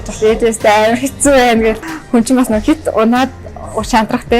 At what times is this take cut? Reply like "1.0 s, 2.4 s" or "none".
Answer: 1.8 s